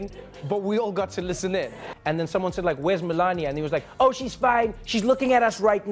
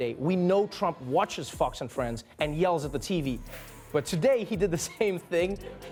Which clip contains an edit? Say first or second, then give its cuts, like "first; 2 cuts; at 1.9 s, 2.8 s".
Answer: first; 1 cut; at 1.9 s